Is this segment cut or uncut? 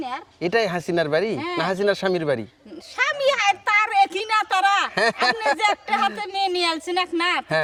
uncut